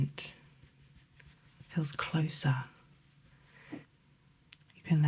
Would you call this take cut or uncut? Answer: cut